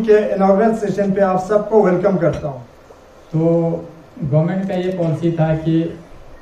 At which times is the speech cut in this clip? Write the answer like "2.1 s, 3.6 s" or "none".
2.5 s